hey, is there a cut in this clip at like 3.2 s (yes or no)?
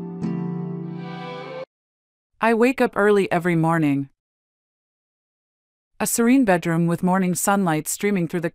no